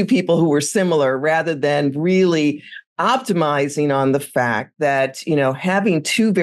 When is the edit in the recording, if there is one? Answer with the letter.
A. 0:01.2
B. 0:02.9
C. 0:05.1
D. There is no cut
D